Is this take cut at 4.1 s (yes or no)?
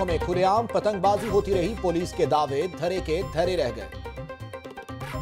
no